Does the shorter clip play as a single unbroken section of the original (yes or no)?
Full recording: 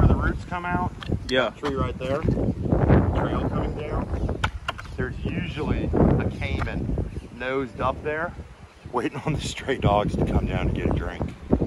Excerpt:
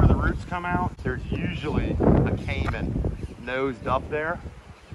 no